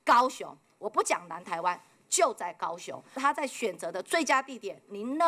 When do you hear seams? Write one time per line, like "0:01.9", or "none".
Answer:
0:03.1